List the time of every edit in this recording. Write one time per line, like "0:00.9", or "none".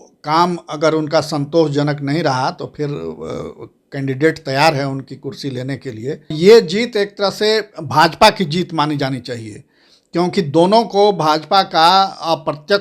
0:06.4